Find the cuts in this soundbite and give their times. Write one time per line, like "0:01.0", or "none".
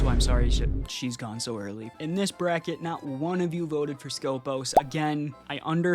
0:01.9